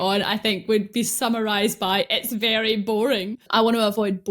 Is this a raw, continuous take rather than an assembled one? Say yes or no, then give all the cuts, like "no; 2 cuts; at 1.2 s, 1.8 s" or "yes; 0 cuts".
no; 1 cut; at 3.4 s